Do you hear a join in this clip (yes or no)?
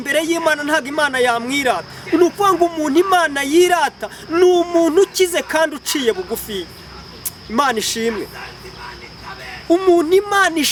no